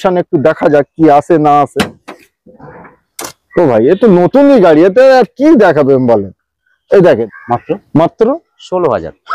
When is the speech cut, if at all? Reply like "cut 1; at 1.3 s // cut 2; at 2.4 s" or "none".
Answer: cut 1; at 7.3 s